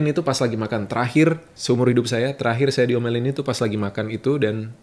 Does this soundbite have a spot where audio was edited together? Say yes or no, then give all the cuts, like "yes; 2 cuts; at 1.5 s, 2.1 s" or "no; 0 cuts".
yes; 1 cut; at 1.5 s